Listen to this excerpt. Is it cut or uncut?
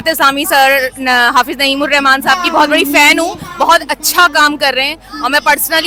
uncut